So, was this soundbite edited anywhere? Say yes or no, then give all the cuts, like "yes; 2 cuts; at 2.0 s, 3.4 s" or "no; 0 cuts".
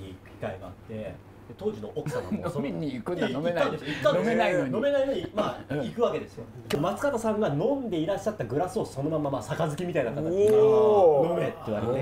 yes; 1 cut; at 6.8 s